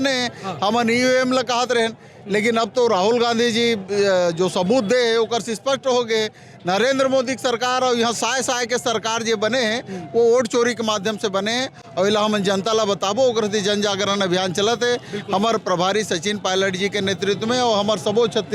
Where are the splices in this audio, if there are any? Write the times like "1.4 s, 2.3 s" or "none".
none